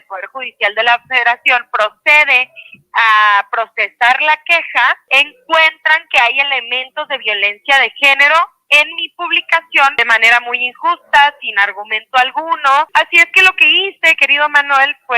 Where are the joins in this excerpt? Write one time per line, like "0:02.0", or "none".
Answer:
0:05.0
0:10.0
0:12.9